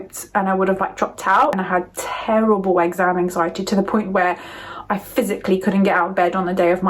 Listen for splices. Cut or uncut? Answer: cut